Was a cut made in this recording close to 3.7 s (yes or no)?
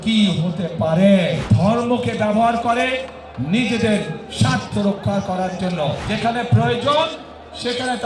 no